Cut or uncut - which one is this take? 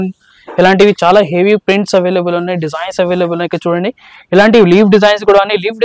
uncut